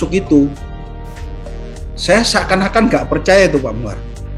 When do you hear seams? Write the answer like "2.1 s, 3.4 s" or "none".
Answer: none